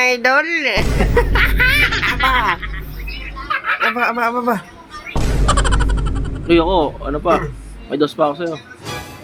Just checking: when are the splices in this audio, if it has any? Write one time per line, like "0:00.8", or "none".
none